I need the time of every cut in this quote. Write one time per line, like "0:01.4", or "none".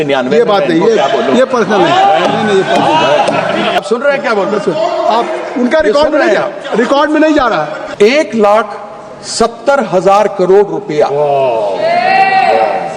0:03.8
0:07.8